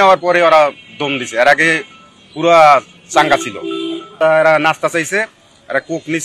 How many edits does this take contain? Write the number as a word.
one